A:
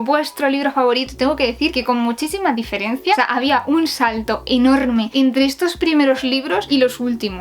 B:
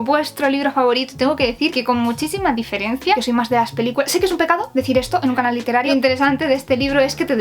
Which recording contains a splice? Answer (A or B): B